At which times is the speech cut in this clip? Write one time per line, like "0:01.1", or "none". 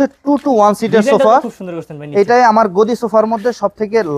none